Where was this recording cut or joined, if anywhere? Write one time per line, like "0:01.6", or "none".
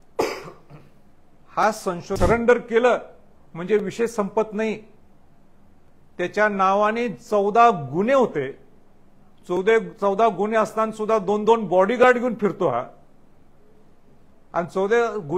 0:02.2